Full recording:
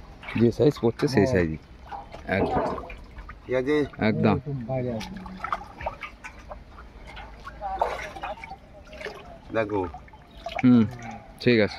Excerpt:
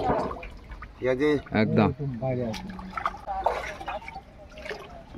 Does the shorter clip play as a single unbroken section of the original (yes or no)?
no